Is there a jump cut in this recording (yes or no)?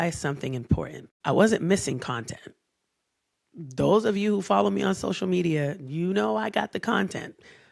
yes